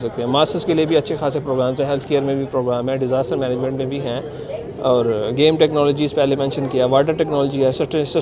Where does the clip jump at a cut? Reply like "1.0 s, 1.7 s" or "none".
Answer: none

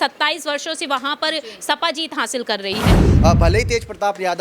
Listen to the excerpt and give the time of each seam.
3.0 s

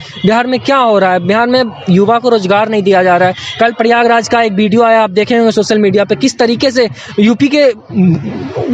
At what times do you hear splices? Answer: none

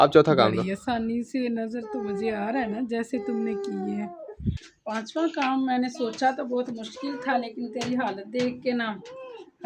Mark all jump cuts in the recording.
4.7 s

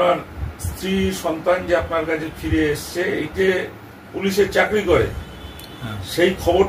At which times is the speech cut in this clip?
3.3 s

